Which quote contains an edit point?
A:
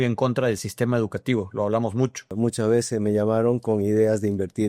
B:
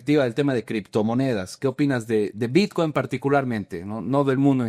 A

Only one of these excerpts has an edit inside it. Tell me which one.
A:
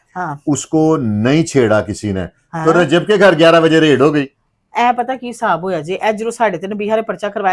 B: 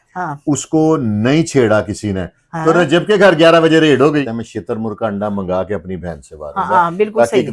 B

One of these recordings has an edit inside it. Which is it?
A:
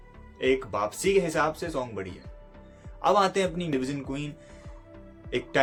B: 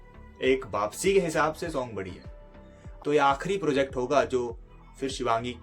B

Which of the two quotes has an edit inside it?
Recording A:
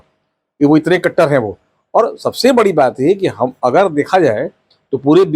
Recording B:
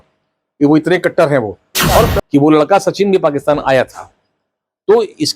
B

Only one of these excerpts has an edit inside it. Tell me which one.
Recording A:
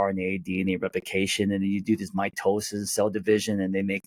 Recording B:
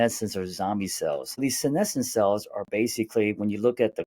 B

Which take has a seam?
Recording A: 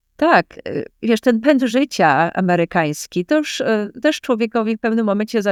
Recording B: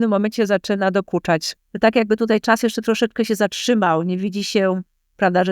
B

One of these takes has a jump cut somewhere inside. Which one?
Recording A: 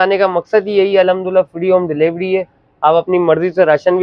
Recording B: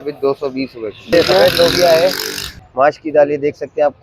B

